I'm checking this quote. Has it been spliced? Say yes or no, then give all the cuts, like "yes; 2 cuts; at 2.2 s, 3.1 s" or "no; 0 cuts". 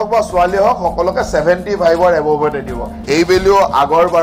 yes; 1 cut; at 3.0 s